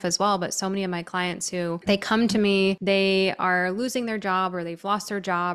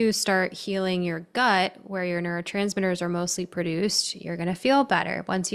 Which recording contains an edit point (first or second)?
first